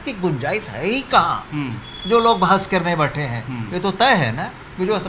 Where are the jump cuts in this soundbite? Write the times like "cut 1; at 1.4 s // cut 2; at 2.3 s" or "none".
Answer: none